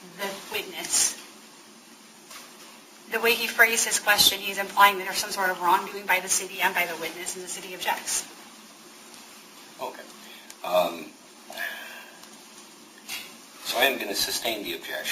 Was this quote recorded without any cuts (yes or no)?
yes